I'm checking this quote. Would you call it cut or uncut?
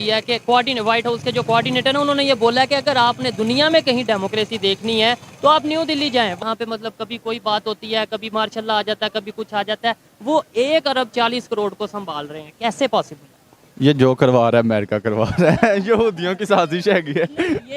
cut